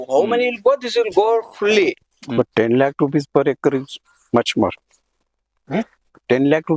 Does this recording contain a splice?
yes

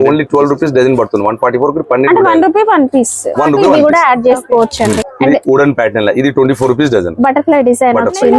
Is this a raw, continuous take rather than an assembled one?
no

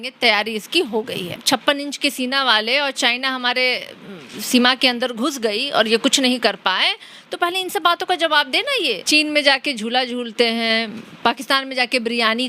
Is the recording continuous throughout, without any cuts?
no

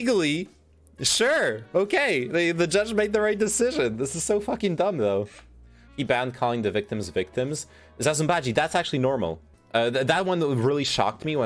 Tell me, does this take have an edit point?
no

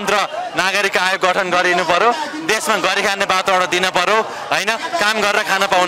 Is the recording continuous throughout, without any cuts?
yes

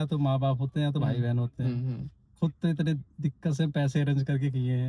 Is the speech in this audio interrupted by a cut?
no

